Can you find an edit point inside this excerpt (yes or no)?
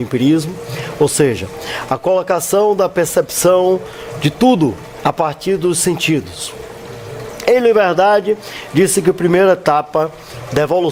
no